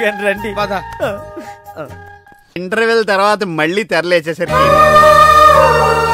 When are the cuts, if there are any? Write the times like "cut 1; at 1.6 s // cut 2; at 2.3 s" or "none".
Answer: cut 1; at 2.6 s